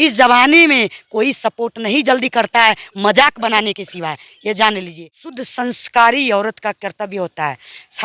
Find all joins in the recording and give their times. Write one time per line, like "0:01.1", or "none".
0:05.2